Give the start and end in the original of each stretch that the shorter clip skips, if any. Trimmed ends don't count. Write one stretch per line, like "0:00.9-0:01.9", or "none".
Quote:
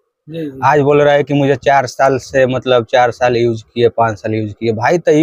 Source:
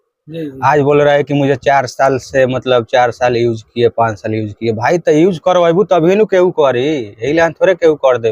none